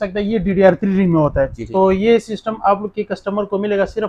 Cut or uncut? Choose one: cut